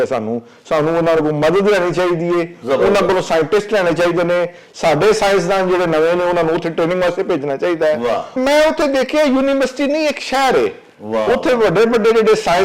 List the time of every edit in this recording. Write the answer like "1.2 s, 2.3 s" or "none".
8.3 s